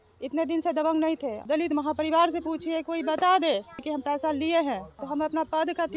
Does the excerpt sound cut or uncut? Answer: cut